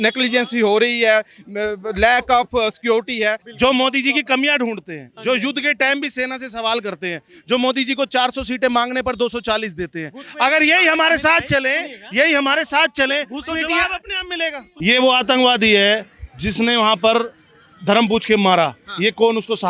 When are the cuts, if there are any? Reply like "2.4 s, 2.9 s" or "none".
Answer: 3.5 s, 14.7 s